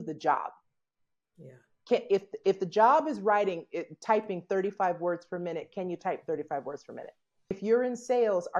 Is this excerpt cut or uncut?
cut